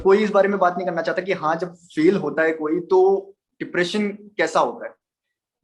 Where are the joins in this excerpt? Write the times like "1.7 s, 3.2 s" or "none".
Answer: none